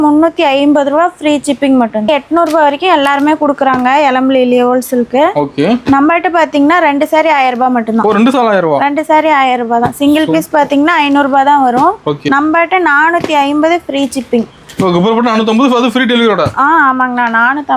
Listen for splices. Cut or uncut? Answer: cut